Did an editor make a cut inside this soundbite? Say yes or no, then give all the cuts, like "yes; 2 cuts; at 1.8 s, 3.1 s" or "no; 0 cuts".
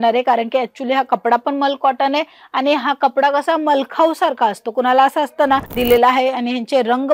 yes; 1 cut; at 5.7 s